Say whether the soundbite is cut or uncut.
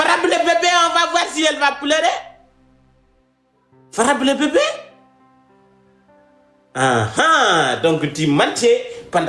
uncut